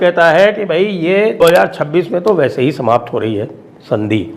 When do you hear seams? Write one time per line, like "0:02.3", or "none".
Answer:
0:01.5